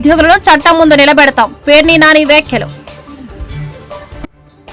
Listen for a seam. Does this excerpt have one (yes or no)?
yes